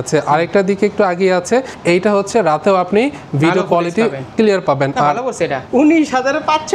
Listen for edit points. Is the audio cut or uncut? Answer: cut